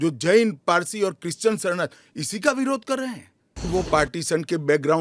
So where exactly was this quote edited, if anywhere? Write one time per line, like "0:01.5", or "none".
0:03.7